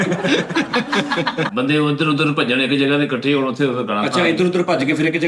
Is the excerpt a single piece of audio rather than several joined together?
no; 1 cut; at 1.5 s

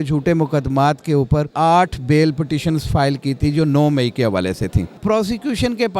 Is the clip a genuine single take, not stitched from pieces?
no; 2 cuts; at 1.5 s, 5.0 s

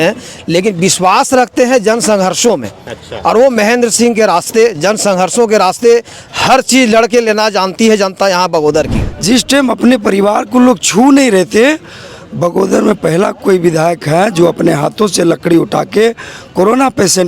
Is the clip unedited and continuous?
no; 1 cut; at 9.1 s

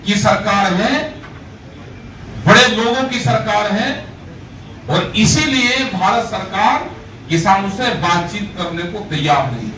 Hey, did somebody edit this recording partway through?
no; 0 cuts

